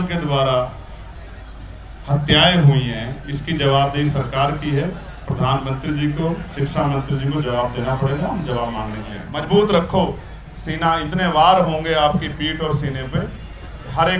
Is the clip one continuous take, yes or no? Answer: no